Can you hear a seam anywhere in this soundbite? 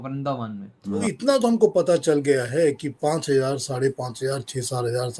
yes; 1 cut; at 1.0 s

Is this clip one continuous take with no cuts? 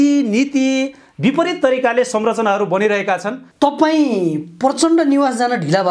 no; 1 cut; at 3.4 s

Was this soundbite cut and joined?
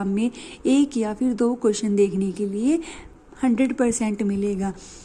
no; 0 cuts

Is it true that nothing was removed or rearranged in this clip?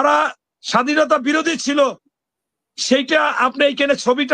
yes; 0 cuts

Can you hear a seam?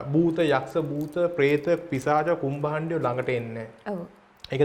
no; 0 cuts

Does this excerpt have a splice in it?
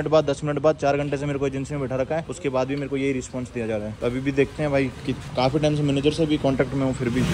no; 0 cuts

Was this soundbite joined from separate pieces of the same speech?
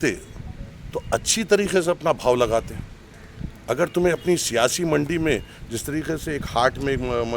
no; 0 cuts

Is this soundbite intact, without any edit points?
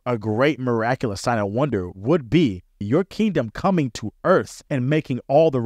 no; 3 cuts; at 1.9 s, 2.8 s, 4.6 s

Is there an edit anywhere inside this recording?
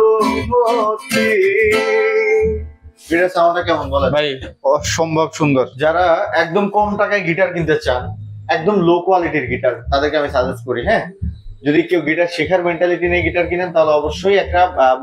no; 0 cuts

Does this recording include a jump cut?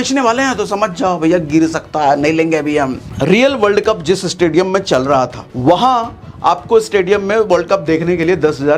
yes; 2 cuts; at 3.0 s, 5.4 s

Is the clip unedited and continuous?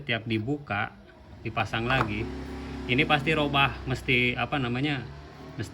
yes; 0 cuts

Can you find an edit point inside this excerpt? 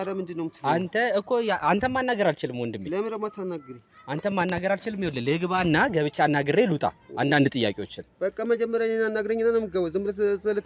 no; 0 cuts

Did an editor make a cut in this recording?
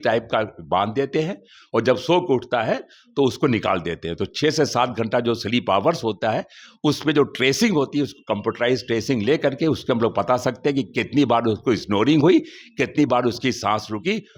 no; 0 cuts

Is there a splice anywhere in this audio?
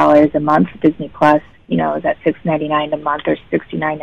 no; 0 cuts

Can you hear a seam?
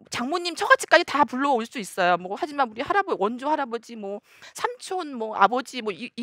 no; 0 cuts

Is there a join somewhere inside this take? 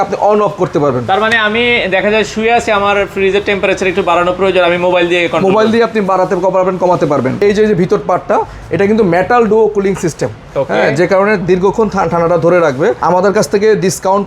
yes; 2 cuts; at 7.4 s, 13.0 s

